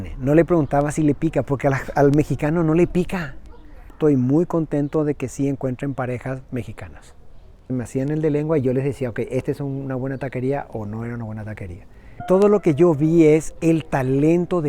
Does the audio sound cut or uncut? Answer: cut